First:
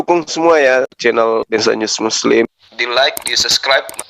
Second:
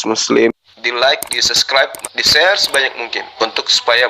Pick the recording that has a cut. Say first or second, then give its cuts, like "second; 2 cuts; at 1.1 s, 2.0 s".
first; 1 cut; at 0.9 s